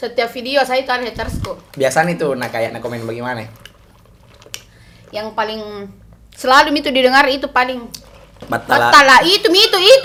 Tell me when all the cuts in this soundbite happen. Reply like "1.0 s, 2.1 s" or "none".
none